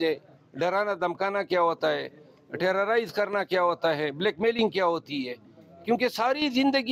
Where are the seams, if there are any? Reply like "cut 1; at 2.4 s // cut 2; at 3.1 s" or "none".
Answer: none